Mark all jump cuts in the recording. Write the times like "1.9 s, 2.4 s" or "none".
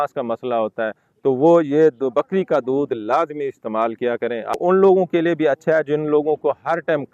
4.5 s

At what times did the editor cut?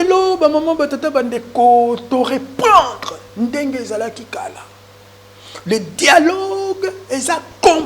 none

